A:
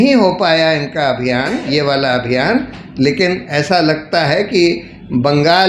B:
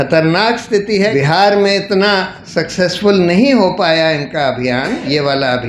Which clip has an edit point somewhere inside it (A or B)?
B